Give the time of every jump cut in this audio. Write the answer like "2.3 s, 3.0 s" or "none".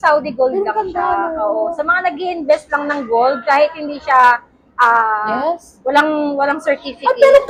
none